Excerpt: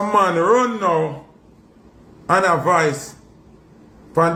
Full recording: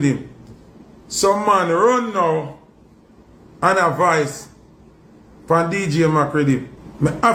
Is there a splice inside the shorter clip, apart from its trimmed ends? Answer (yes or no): no